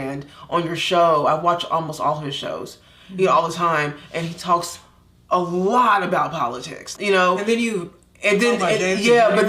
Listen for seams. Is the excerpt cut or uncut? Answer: cut